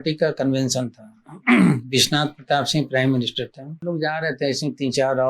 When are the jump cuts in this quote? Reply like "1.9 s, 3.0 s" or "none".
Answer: 3.9 s